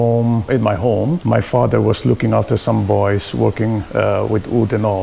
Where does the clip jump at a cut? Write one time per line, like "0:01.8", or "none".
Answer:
0:00.9
0:03.8

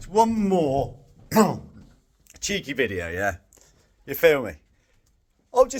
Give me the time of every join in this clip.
none

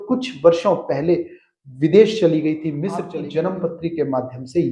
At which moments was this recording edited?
0:03.0

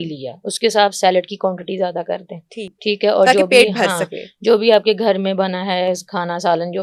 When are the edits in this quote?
none

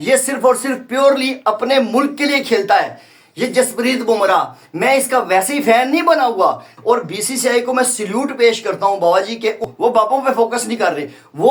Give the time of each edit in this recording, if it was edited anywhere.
0:06.7
0:09.7

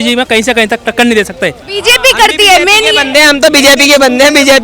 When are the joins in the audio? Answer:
0:01.7

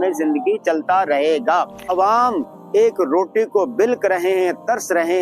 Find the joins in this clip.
0:01.9

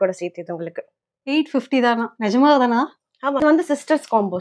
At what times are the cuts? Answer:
0:03.4

